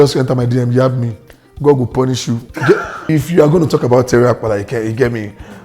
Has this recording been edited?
yes; 1 cut; at 3.1 s

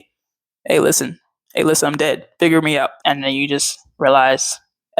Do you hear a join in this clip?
yes; 1 cut; at 2.9 s

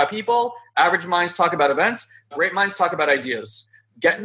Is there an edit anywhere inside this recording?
yes; 1 cut; at 2.3 s

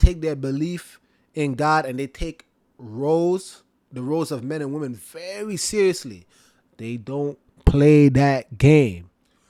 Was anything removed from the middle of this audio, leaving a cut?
no; 0 cuts

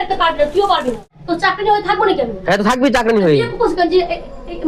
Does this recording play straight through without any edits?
no; 1 cut; at 1.2 s

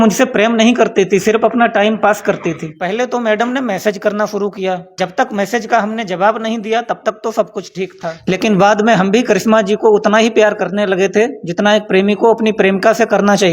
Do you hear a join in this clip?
yes; 3 cuts; at 2.7 s, 4.9 s, 8.1 s

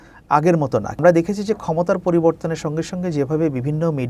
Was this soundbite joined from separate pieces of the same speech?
yes; 1 cut; at 1.0 s

